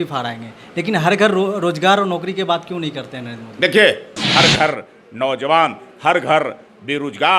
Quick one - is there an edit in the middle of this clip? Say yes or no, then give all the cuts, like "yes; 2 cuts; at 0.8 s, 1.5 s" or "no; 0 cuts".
yes; 1 cut; at 4.1 s